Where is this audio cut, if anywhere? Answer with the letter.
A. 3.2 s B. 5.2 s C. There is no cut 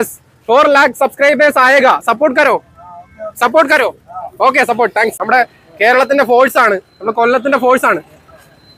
B